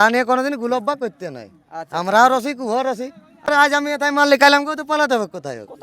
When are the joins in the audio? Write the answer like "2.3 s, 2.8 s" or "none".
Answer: 3.5 s